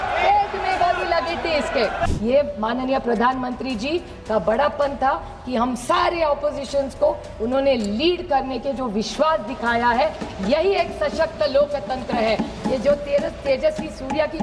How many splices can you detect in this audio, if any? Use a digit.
1